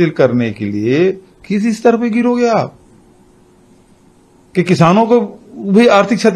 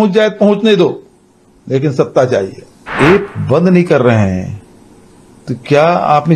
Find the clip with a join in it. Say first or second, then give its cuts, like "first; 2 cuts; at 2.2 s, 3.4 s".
second; 1 cut; at 2.8 s